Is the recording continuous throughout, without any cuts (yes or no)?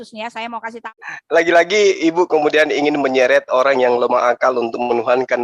no